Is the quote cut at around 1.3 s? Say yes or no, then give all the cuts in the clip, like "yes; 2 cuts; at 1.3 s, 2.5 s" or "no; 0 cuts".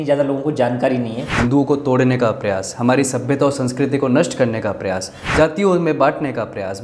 yes; 2 cuts; at 1.3 s, 5.2 s